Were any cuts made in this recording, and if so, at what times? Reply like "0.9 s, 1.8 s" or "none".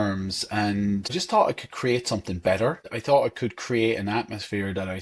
1.1 s, 2.9 s

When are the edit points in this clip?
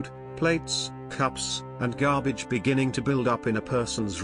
none

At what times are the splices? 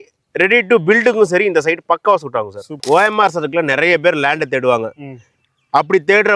2.8 s

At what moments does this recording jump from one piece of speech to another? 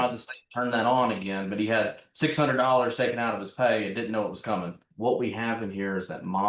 4.8 s

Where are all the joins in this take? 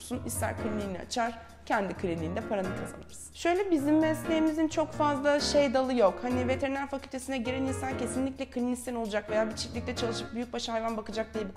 3.4 s

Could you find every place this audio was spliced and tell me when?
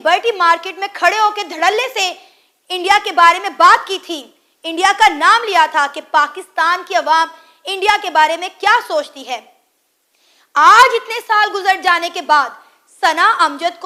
none

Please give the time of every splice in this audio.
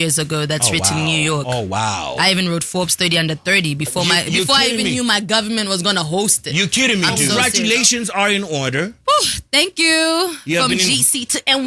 7.4 s

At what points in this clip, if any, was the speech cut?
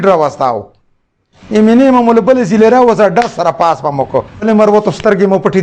4.4 s

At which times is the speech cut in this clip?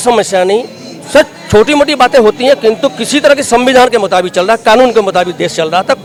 none

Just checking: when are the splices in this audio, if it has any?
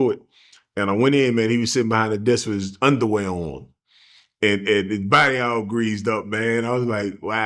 none

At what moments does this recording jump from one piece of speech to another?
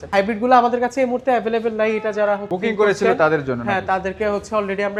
none

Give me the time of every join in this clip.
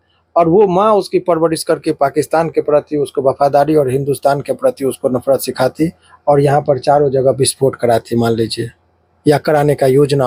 none

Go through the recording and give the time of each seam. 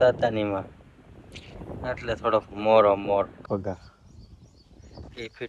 3.4 s

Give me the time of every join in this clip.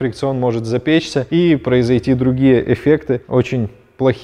none

